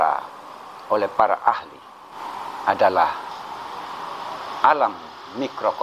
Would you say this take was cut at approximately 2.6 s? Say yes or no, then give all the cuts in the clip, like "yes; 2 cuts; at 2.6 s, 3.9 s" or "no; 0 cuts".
no; 0 cuts